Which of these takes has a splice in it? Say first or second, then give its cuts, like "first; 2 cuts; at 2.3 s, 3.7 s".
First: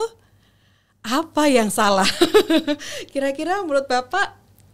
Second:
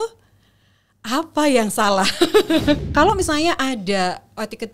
second; 1 cut; at 2.9 s